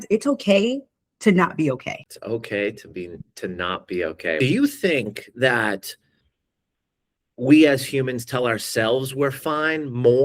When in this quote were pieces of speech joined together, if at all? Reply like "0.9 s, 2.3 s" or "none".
2.1 s, 4.4 s